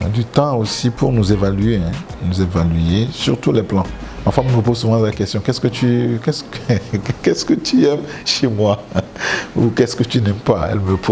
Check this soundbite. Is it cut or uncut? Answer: uncut